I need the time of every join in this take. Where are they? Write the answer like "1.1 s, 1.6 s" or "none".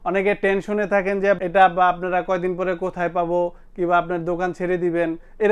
1.4 s